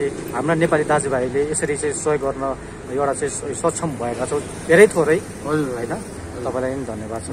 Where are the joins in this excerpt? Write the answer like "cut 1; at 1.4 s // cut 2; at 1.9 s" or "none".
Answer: cut 1; at 6.2 s